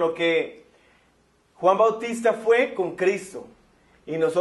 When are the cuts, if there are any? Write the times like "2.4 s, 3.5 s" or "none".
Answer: 2.7 s